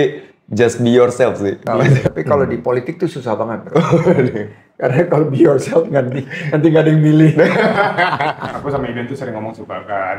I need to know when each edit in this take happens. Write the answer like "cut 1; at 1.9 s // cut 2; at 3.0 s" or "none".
cut 1; at 2.0 s // cut 2; at 8.5 s